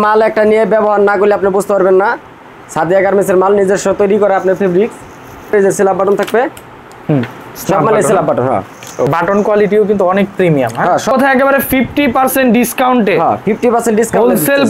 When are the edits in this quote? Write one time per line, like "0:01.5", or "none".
0:05.5
0:09.1
0:11.1